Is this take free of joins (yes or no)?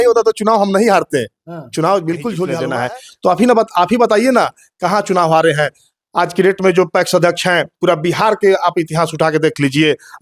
no